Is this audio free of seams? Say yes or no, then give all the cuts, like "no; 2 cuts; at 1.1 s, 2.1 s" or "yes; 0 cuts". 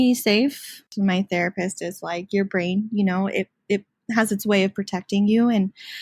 no; 1 cut; at 0.9 s